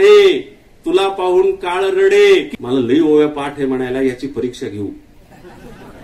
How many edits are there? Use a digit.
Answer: 1